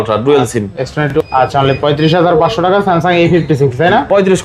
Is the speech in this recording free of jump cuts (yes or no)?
no